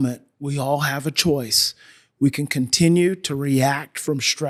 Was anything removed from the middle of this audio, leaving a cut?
no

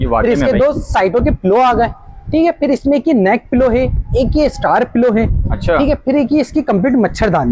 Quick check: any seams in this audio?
no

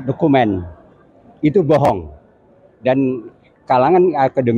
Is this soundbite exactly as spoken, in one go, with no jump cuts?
yes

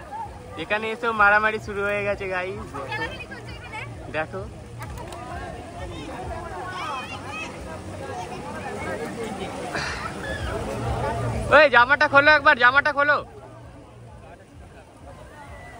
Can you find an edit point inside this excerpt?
no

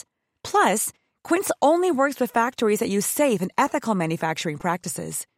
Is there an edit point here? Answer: no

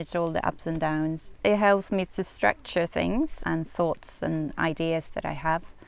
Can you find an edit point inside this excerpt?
yes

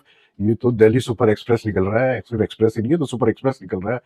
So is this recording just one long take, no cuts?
yes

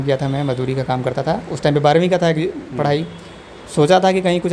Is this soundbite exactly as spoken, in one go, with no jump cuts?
yes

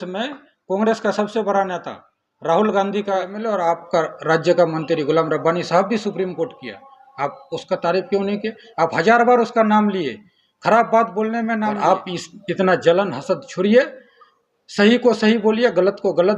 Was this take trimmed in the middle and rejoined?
yes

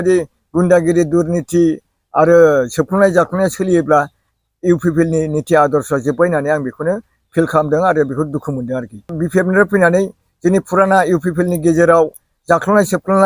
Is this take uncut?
no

